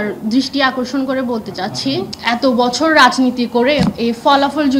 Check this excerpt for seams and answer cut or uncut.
cut